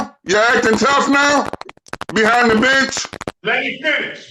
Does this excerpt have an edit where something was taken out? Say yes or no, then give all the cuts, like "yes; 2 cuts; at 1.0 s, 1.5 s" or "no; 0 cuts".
yes; 1 cut; at 3.3 s